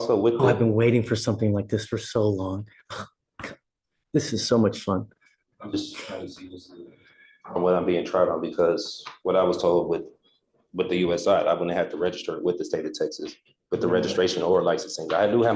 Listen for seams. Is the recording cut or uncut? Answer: uncut